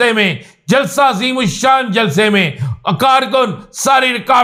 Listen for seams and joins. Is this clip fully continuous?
yes; 0 cuts

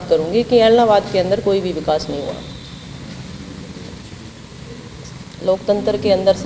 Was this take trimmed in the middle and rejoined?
yes; 1 cut; at 4.0 s

